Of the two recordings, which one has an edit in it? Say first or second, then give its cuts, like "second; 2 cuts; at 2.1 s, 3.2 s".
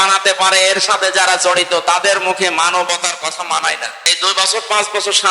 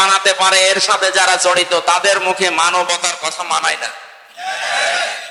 first; 1 cut; at 4.1 s